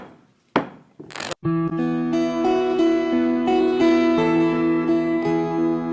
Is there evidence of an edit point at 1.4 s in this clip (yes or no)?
yes